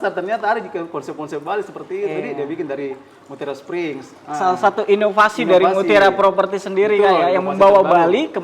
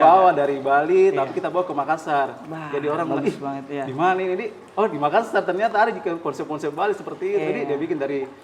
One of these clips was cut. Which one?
first; 1 cut; at 4.2 s

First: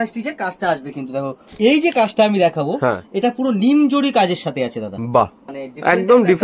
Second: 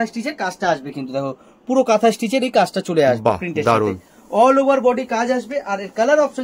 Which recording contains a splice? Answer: first; 2 cuts; at 1.4 s, 5.4 s

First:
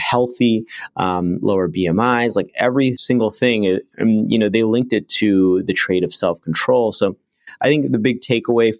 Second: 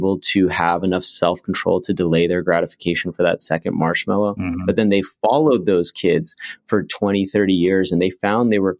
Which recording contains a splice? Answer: first; 1 cut; at 3.0 s

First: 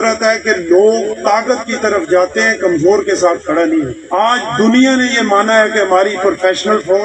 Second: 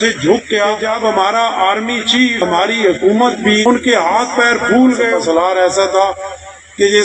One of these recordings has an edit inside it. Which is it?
second; 4 cuts; at 0.8 s, 2.4 s, 3.7 s, 5.2 s

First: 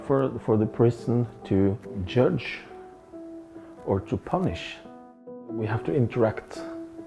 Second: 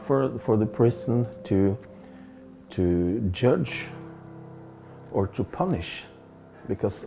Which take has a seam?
first; 2 cuts; at 2.0 s, 5.2 s

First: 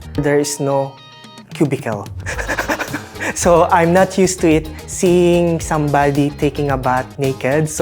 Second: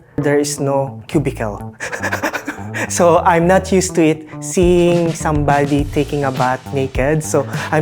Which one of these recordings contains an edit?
second; 1 cut; at 1.0 s

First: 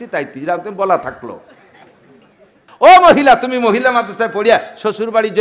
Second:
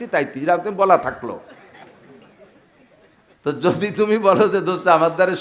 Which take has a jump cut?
first; 1 cut; at 2.7 s

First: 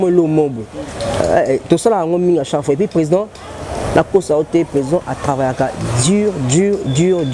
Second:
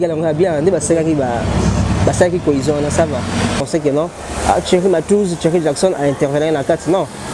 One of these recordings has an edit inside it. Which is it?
second; 1 cut; at 3.6 s

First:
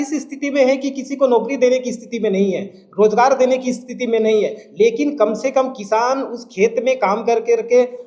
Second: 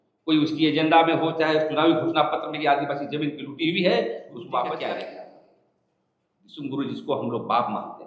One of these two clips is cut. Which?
second; 1 cut; at 4.8 s

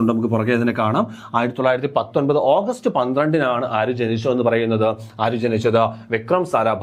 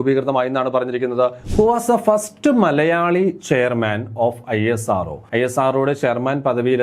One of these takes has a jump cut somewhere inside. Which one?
second; 2 cuts; at 1.4 s, 5.2 s

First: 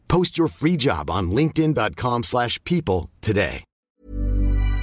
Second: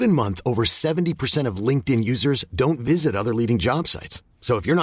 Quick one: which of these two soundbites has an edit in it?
first; 1 cut; at 3.7 s

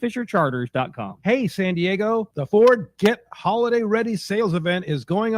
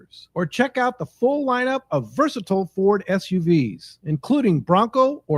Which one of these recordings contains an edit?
first; 1 cut; at 1.2 s

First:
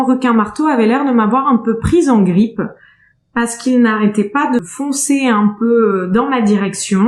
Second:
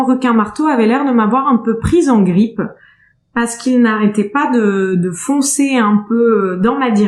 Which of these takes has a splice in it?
first; 1 cut; at 4.6 s

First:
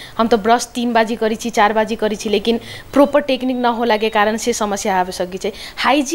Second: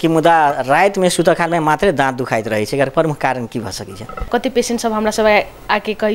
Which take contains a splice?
second; 1 cut; at 4.3 s

